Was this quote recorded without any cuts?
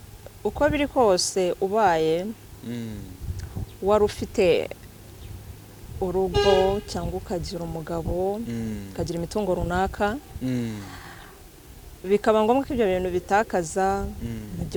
yes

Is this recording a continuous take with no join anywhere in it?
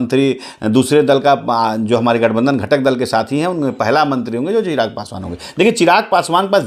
yes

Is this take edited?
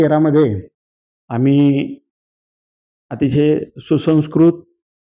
no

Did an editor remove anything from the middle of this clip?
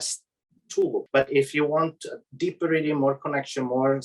yes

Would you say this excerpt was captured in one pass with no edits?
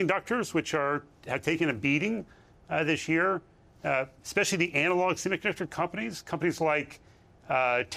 yes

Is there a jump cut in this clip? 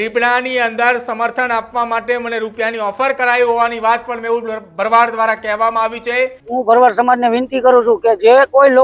yes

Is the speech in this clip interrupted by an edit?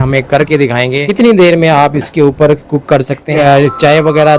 yes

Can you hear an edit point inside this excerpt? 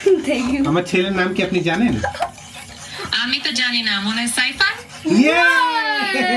no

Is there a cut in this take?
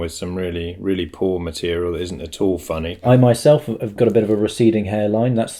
yes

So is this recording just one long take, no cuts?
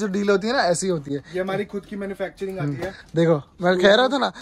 yes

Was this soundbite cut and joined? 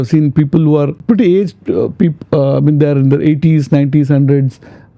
yes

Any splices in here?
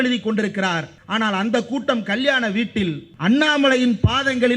yes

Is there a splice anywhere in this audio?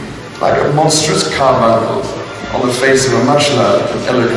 no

